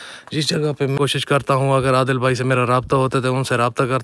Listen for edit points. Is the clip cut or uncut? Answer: cut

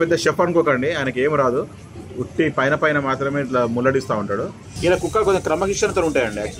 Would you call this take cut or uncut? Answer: cut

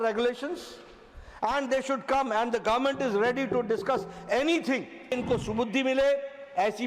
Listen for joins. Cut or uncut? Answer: cut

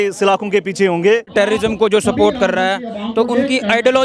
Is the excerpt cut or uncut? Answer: cut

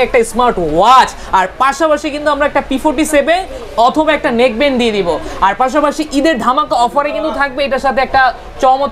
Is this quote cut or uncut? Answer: uncut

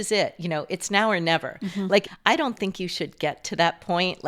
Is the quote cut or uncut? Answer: cut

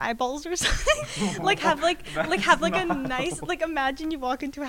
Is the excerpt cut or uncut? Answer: cut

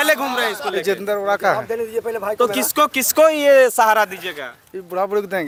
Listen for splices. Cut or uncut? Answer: uncut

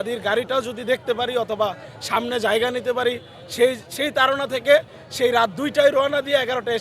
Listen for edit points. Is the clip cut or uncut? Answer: uncut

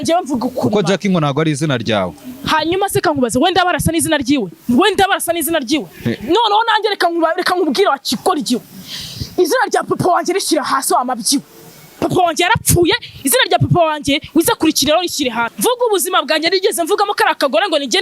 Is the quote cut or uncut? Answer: cut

